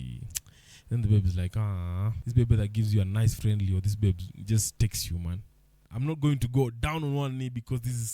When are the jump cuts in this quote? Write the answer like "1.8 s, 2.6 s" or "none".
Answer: 2.2 s, 5.9 s